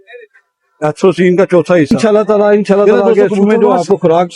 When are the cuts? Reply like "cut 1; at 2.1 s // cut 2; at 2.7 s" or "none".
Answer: cut 1; at 1.9 s